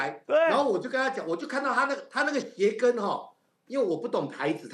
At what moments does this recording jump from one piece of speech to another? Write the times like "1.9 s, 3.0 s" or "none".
none